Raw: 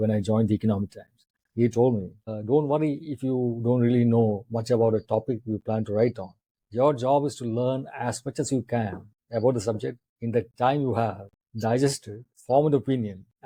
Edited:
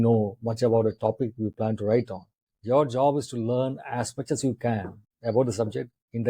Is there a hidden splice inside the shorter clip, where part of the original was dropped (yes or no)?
no